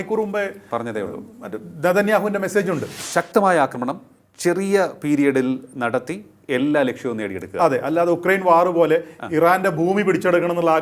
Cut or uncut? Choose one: cut